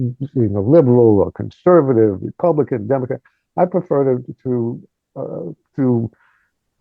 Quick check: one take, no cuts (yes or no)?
yes